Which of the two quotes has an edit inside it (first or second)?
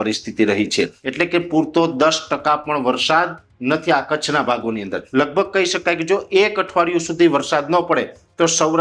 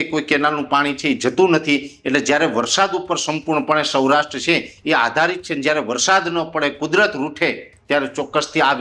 first